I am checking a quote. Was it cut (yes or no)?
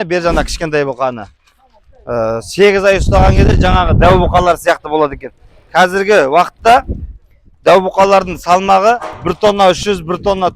yes